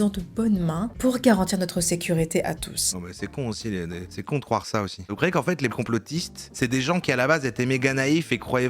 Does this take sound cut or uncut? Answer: cut